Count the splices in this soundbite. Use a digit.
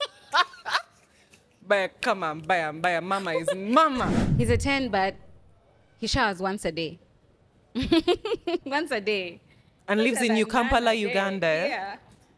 1